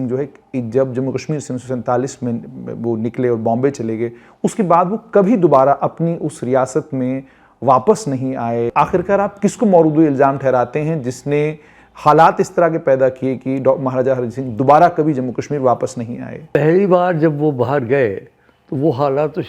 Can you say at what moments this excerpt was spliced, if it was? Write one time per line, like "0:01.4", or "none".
0:08.7